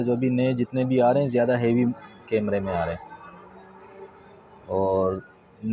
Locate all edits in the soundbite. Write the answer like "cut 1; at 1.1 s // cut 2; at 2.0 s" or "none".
none